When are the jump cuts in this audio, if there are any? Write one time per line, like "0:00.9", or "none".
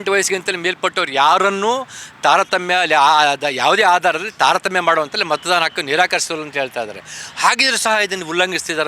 none

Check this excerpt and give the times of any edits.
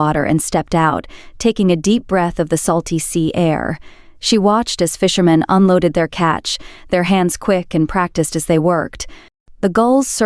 none

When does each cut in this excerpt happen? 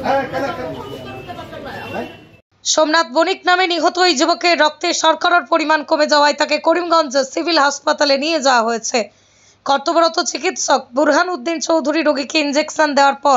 0:02.5

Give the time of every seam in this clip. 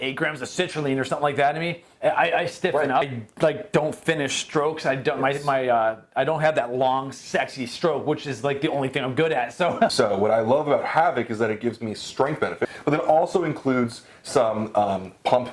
0:03.1
0:09.9
0:12.7

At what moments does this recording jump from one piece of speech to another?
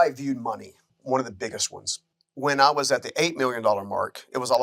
0:00.8
0:02.1

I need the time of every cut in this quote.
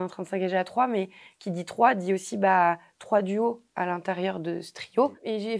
none

